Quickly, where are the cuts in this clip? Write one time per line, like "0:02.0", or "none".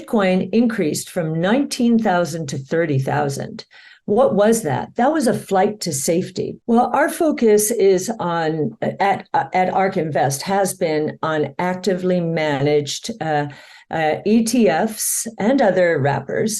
0:06.5